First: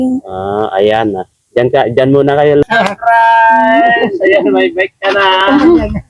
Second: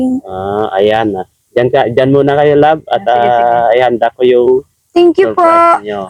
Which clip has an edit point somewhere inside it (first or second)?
first